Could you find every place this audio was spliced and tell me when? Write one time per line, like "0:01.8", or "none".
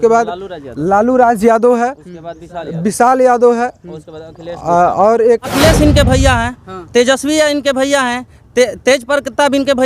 0:05.5